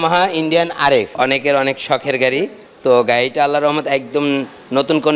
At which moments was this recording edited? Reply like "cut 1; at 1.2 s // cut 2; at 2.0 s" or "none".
cut 1; at 1.1 s // cut 2; at 2.7 s